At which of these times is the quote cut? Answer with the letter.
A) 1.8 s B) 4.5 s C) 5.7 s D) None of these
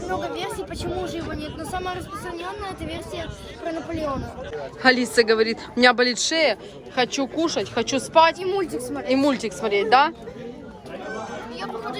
B